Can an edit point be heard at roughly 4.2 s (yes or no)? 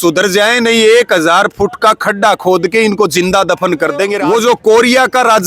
yes